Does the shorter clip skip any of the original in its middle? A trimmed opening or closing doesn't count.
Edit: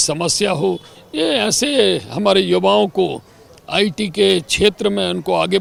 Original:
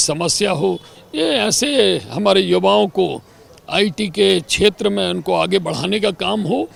no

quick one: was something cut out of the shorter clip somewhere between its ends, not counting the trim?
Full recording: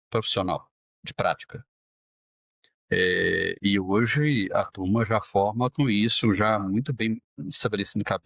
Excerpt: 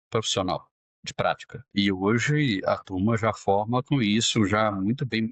yes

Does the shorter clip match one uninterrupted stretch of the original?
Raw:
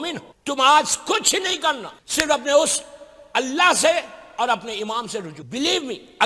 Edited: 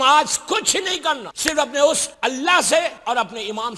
no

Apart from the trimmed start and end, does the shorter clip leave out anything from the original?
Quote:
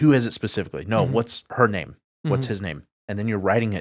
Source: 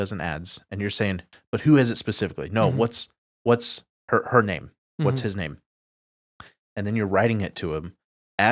yes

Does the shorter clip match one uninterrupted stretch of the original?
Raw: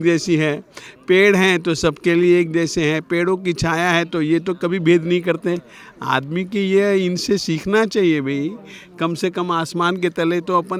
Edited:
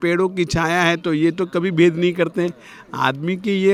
yes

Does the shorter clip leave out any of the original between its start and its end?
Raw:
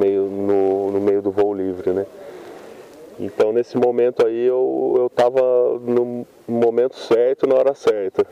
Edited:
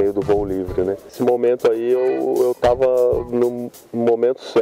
yes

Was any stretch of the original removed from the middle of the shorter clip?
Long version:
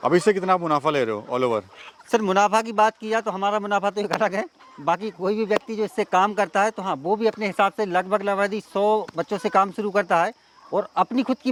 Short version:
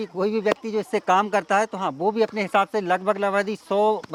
no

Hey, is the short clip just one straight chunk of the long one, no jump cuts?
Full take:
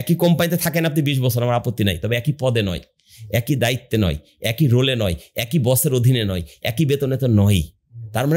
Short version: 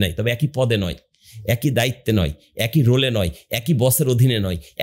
yes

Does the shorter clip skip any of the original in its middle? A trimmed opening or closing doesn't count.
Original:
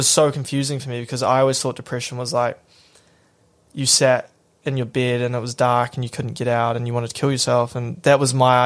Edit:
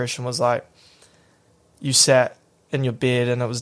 no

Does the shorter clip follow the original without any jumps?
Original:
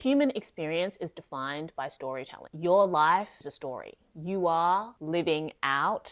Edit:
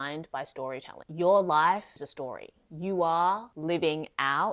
yes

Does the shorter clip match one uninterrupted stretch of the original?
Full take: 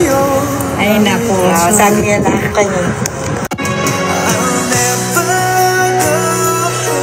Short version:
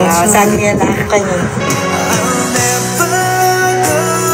no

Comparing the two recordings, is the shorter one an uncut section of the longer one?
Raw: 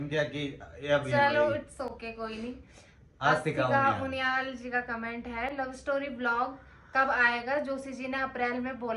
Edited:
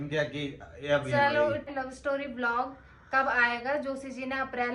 no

